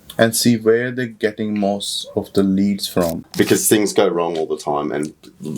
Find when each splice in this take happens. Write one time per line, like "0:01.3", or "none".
0:03.3